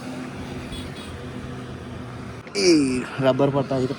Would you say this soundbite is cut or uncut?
cut